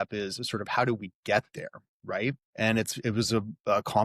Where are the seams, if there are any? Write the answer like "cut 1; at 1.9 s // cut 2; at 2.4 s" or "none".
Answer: cut 1; at 2.1 s

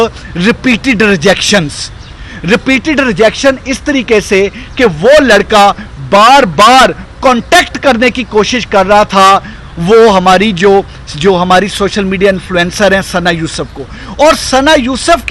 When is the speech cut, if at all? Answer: none

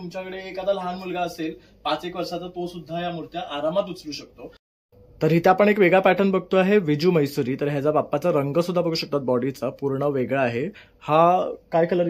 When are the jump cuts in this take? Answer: cut 1; at 4.7 s

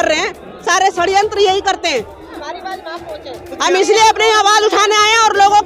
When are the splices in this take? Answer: cut 1; at 2.2 s

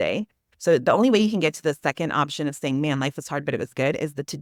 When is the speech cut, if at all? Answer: none

